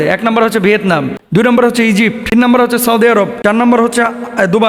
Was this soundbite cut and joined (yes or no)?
yes